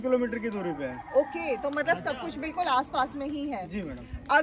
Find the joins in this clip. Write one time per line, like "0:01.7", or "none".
none